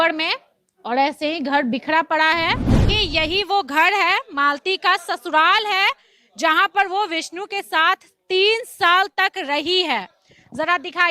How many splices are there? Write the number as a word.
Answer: one